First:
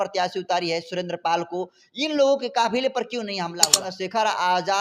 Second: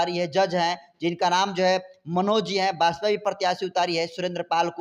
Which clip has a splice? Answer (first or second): first